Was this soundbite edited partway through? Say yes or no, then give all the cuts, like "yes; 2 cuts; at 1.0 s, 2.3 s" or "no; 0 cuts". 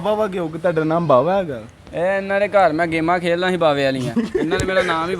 no; 0 cuts